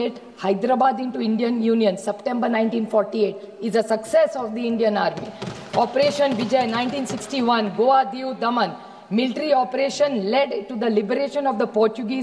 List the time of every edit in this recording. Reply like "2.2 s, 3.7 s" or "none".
none